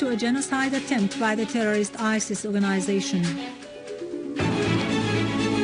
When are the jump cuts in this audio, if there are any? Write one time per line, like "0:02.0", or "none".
0:02.0